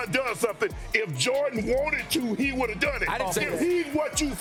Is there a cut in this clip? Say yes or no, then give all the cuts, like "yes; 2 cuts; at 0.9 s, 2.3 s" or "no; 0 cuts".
no; 0 cuts